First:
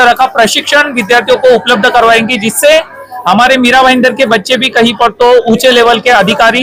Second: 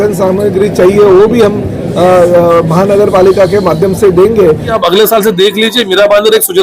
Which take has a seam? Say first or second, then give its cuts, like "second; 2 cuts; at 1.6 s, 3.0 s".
second; 1 cut; at 4.7 s